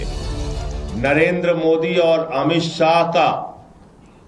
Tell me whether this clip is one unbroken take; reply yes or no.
no